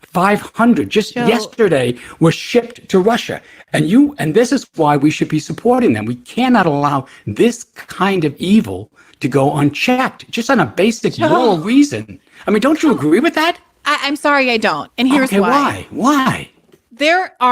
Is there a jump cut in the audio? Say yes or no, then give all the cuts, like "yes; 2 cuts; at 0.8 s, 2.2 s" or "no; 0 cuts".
yes; 1 cut; at 6.4 s